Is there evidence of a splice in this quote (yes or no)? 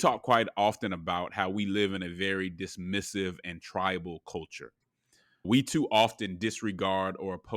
yes